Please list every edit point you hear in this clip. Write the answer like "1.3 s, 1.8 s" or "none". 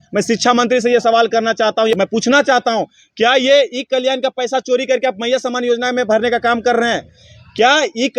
2.0 s